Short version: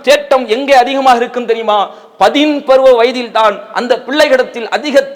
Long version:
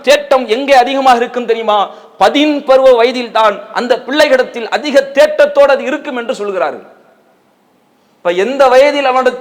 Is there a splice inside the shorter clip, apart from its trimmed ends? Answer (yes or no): no